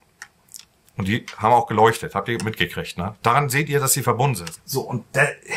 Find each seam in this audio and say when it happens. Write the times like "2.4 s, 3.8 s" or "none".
4.5 s